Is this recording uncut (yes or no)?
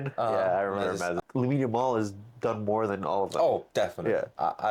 no